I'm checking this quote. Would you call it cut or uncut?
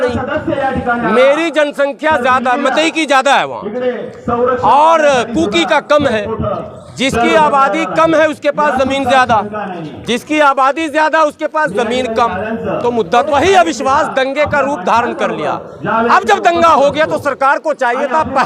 cut